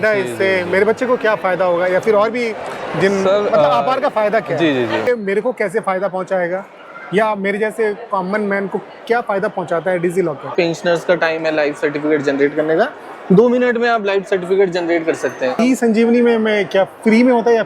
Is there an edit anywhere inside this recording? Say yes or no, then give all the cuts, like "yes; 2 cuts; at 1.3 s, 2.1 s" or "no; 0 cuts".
yes; 3 cuts; at 5.1 s, 10.5 s, 15.6 s